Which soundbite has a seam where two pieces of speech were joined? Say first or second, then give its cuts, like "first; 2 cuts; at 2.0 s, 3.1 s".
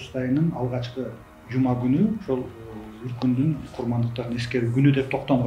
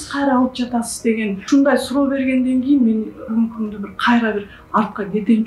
second; 2 cuts; at 1.4 s, 3.3 s